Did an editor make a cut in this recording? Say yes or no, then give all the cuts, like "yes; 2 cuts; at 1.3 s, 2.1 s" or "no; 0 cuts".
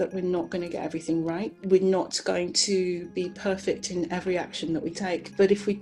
no; 0 cuts